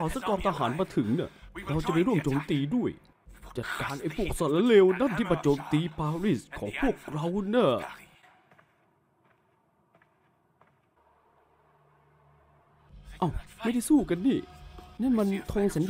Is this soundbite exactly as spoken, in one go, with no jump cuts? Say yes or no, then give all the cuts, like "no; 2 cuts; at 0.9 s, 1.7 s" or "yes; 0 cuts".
no; 1 cut; at 11.0 s